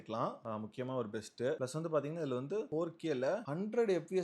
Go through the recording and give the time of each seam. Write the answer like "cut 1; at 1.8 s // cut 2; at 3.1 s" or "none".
cut 1; at 2.7 s